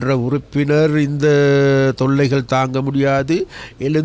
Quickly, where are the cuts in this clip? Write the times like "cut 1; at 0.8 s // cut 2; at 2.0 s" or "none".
none